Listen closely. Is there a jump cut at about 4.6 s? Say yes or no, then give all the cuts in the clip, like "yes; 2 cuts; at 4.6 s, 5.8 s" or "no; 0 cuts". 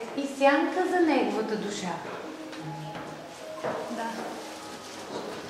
no; 0 cuts